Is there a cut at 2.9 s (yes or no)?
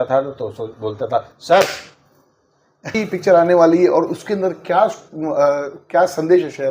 yes